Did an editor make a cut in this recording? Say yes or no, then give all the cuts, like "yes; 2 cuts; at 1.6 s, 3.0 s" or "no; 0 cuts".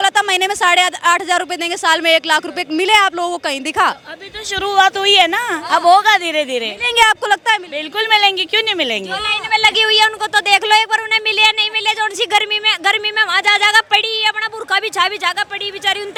no; 0 cuts